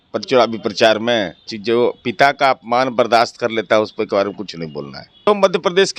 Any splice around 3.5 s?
no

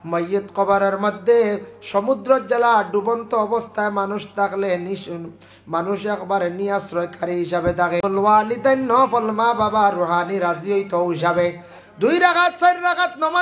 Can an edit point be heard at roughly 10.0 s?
no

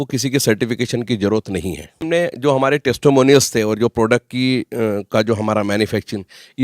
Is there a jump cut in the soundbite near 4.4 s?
no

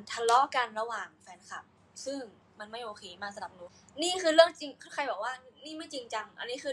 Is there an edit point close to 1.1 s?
no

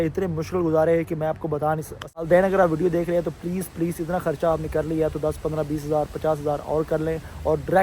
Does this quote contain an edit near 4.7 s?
no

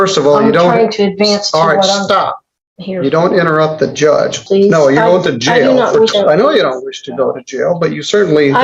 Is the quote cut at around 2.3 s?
no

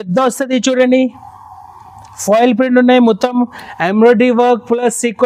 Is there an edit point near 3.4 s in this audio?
no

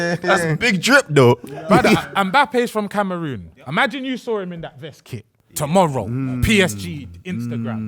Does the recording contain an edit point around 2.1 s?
yes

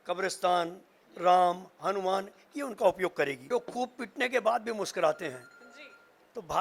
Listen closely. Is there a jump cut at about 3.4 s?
yes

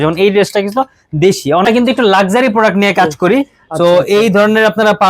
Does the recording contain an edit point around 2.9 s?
no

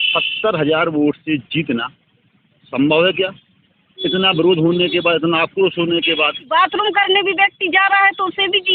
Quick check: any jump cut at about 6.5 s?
yes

